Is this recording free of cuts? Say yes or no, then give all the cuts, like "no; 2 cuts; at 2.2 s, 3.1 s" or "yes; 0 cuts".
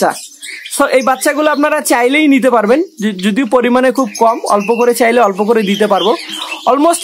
yes; 0 cuts